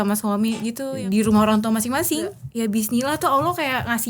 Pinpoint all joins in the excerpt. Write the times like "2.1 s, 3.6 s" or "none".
0.9 s, 2.4 s